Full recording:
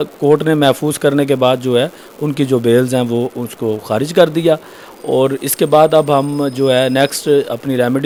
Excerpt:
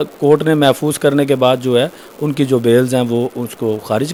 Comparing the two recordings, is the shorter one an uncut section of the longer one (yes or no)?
yes